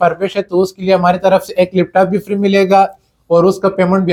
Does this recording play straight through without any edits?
yes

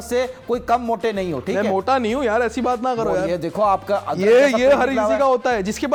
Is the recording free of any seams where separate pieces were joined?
yes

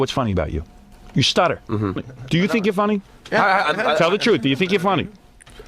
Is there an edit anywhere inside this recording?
yes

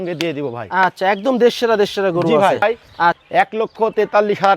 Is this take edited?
yes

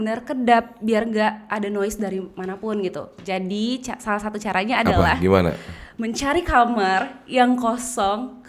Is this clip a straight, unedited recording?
yes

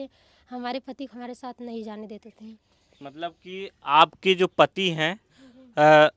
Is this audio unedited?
yes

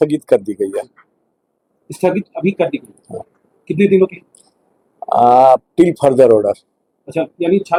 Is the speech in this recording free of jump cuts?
yes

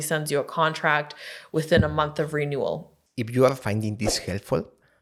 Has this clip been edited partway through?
no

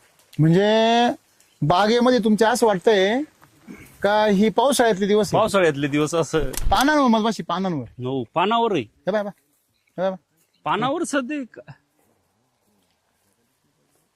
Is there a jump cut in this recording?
yes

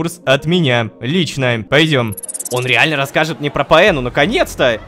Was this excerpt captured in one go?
no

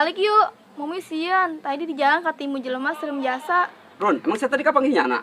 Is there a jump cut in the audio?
yes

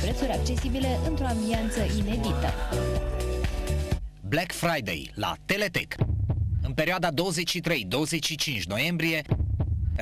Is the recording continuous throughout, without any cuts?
no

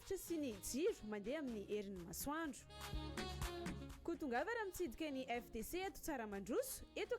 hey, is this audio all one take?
yes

